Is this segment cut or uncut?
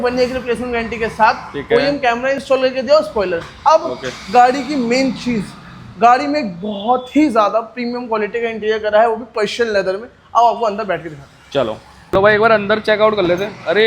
uncut